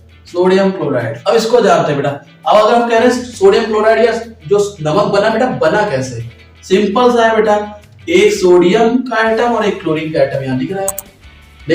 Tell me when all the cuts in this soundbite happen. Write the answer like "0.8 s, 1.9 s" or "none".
1.1 s